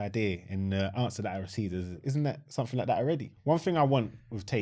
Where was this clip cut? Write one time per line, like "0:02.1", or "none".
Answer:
0:02.0
0:03.3